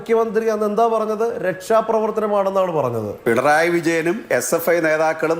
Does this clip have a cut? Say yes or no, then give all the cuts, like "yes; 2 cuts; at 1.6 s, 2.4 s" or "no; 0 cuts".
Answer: yes; 1 cut; at 3.1 s